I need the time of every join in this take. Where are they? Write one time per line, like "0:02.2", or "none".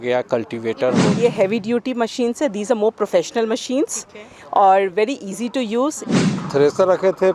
0:01.2
0:06.4